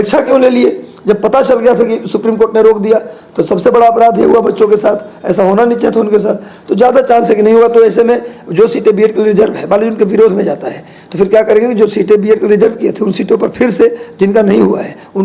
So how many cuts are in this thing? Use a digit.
0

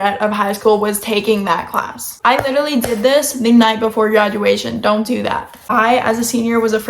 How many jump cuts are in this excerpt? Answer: 2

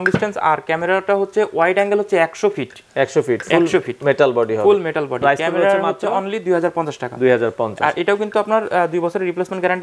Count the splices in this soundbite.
0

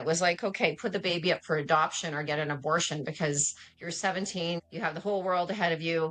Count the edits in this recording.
1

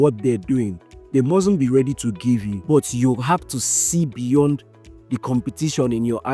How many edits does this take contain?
1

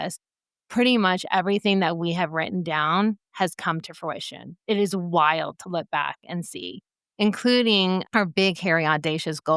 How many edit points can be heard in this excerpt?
1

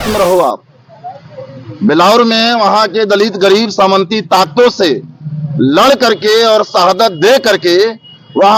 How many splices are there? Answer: 0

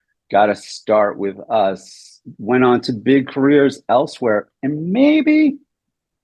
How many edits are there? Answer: 0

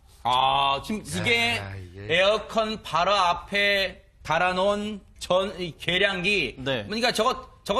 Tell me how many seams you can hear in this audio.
1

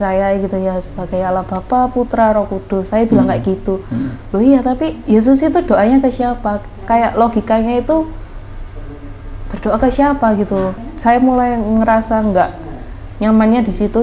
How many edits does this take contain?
1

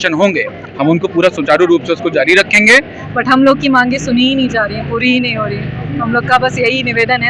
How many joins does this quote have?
1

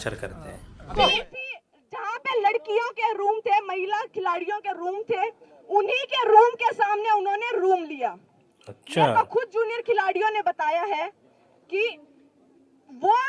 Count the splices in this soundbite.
1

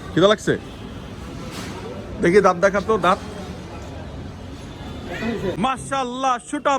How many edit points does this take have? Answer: 1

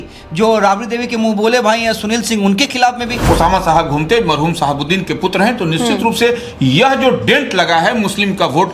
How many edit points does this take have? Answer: 1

